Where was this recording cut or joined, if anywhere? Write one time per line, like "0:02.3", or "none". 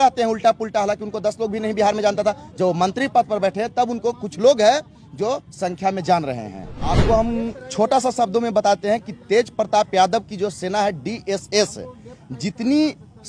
0:07.0

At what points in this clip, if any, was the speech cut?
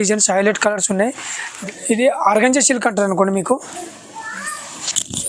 0:01.5

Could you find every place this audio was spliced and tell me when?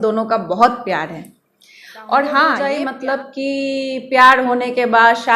0:02.6

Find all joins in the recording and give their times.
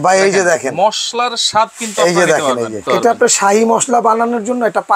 0:02.8

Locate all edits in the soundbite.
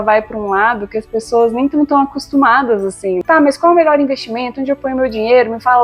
0:03.2

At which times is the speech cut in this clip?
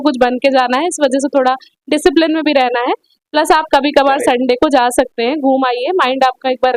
none

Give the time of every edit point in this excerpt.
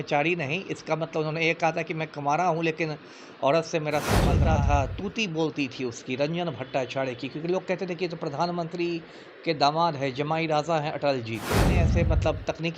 0:04.4
0:11.8

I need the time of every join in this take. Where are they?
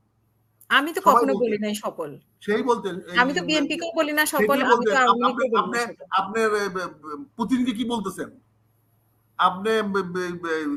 none

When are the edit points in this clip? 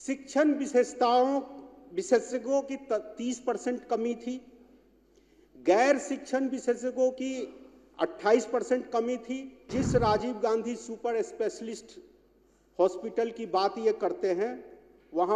0:09.7

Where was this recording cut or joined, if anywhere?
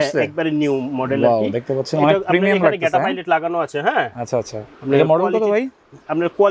none

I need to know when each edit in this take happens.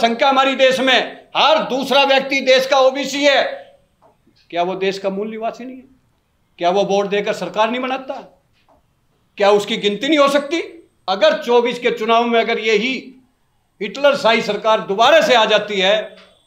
0:10.9

